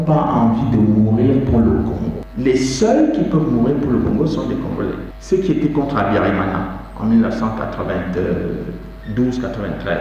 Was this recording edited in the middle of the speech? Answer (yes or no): yes